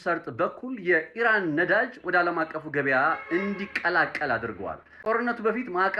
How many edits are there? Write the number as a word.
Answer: one